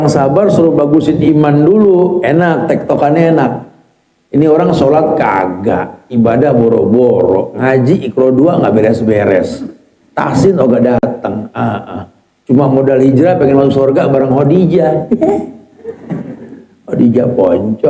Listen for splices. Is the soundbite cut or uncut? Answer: uncut